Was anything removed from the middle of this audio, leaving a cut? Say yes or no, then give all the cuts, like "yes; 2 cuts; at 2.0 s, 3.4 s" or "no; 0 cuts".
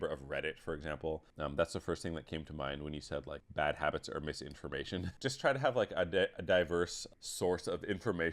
yes; 4 cuts; at 1.3 s, 3.4 s, 5.1 s, 7.0 s